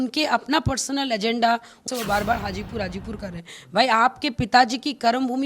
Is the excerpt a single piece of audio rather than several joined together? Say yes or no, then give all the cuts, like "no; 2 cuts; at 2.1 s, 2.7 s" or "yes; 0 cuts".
no; 1 cut; at 1.8 s